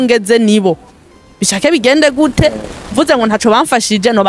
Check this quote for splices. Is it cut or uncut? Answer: uncut